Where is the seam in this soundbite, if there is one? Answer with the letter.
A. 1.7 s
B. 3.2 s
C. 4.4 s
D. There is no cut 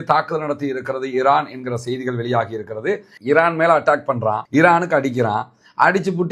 B